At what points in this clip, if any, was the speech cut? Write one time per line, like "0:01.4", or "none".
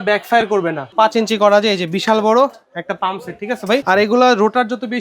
0:00.9
0:03.8